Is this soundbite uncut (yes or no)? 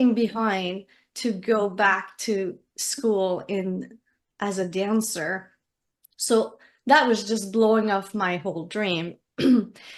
yes